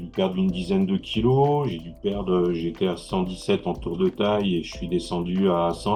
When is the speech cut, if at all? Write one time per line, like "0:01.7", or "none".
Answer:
none